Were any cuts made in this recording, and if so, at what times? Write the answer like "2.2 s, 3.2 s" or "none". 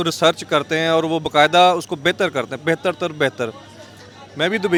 none